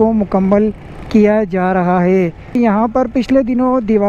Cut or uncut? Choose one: cut